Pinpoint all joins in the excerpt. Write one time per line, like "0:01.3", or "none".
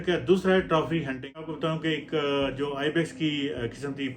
0:01.5